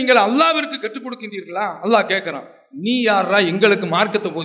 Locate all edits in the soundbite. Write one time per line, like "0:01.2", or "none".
none